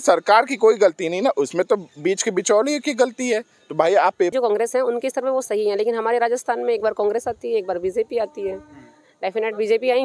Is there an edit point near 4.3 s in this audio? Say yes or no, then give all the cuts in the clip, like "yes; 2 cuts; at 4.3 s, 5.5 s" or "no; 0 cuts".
yes; 1 cut; at 4.3 s